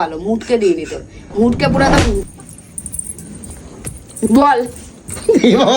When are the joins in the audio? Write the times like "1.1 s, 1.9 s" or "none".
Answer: 2.2 s

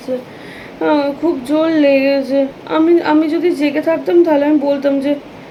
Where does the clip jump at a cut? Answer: none

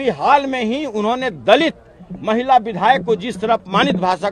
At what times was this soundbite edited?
none

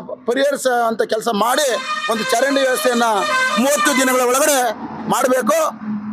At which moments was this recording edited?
none

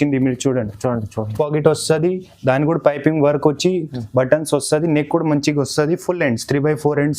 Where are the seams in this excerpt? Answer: 1.3 s

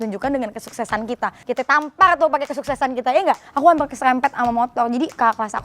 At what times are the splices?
1.4 s, 3.5 s

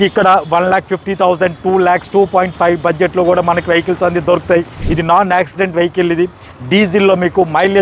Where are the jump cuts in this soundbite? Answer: 4.8 s

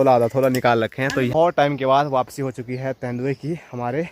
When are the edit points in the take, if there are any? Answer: 1.3 s

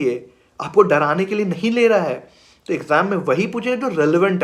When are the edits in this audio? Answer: none

